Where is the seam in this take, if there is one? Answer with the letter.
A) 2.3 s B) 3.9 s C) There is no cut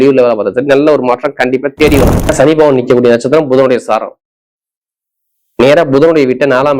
A